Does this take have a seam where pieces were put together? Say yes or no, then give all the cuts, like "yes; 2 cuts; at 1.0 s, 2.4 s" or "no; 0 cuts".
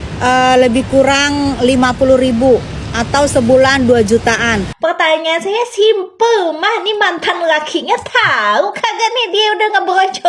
yes; 1 cut; at 4.7 s